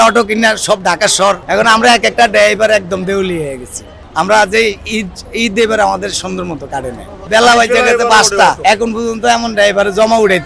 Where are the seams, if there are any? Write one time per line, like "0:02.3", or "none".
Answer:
0:01.4
0:07.2
0:08.6